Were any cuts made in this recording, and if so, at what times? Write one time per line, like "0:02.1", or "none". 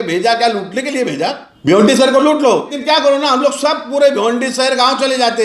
0:01.5
0:02.7